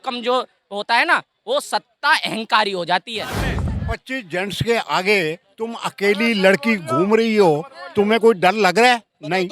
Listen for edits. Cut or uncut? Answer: cut